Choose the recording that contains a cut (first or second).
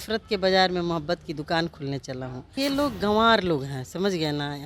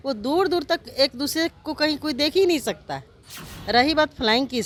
first